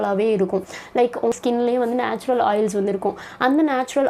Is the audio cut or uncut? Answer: uncut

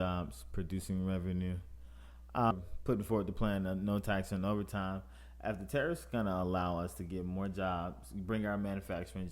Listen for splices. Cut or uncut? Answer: cut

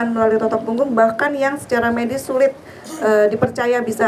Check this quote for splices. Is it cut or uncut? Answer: uncut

